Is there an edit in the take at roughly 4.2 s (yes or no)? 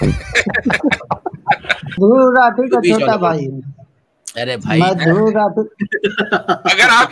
no